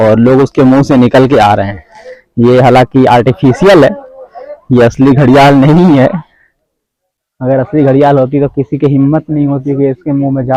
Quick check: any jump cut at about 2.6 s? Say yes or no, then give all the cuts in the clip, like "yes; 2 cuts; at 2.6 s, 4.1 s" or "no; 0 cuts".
no; 0 cuts